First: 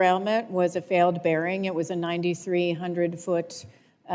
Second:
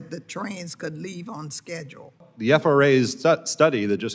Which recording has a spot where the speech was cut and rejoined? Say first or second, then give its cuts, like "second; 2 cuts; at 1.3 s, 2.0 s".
second; 1 cut; at 2.2 s